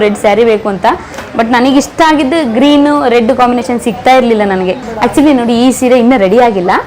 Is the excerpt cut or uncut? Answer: uncut